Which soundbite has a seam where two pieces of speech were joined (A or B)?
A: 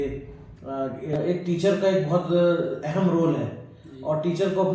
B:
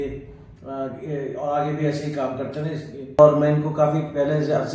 A